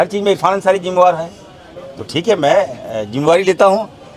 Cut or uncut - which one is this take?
uncut